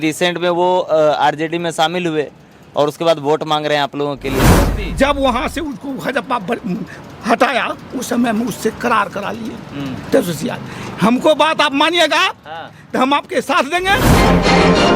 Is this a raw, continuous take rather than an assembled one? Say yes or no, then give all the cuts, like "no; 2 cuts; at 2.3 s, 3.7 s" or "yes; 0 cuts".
no; 2 cuts; at 4.5 s, 14.0 s